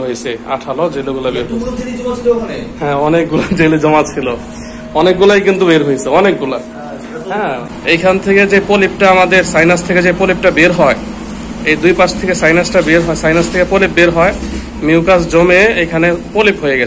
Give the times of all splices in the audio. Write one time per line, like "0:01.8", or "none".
0:07.6

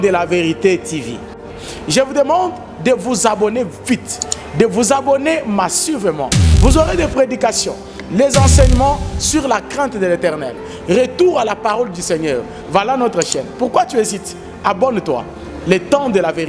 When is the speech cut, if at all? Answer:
none

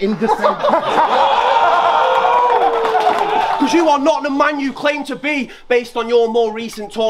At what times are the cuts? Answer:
0:03.6

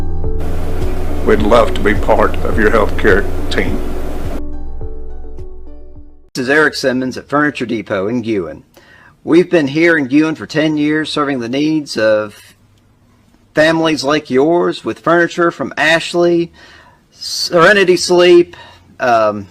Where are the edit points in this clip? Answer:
0:06.1

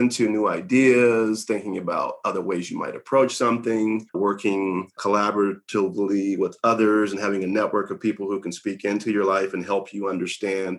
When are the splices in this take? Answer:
0:04.2
0:05.0

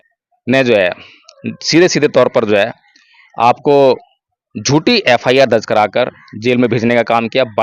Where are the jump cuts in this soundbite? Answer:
none

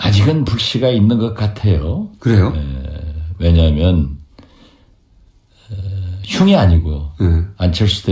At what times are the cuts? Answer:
none

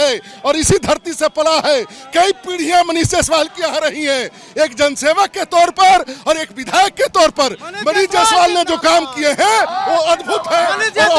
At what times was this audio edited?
none

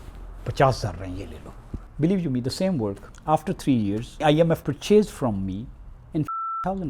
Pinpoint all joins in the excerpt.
0:01.8
0:03.1
0:04.6

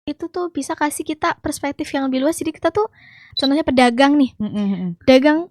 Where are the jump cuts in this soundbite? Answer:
0:03.3

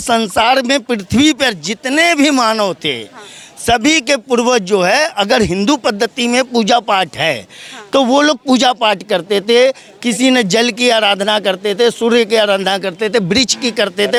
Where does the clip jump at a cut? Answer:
none

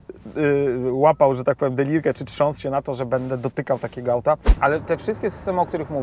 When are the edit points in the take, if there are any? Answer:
0:04.5

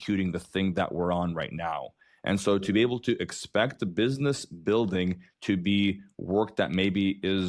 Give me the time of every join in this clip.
none

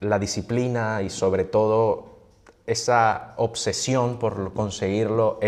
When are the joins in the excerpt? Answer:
none

